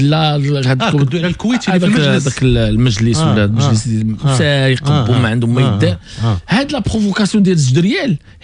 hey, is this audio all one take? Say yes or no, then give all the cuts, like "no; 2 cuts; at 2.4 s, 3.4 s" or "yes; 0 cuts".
yes; 0 cuts